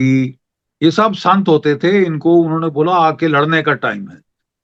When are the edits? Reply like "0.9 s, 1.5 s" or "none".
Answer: none